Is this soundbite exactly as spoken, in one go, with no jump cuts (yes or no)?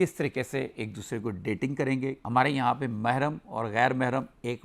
no